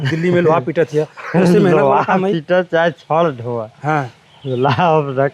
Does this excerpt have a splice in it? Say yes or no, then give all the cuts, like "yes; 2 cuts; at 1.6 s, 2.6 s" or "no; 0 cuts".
no; 0 cuts